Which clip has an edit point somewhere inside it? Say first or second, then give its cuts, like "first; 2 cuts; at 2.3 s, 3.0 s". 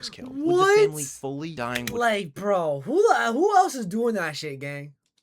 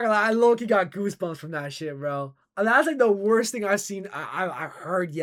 first; 1 cut; at 1.6 s